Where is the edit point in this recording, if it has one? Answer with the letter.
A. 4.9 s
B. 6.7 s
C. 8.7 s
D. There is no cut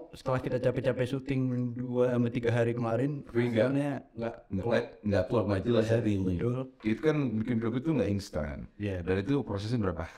B